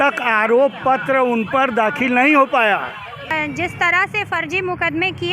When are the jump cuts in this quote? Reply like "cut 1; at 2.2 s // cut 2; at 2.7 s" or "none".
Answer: cut 1; at 3.3 s